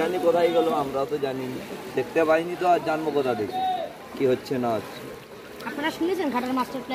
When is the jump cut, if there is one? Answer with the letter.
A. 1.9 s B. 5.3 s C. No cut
C